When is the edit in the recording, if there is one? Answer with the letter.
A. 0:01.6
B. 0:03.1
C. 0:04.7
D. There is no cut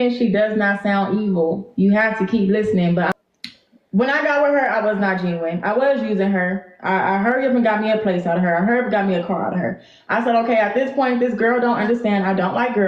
B